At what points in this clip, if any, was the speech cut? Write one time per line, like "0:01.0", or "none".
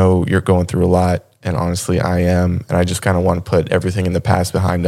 none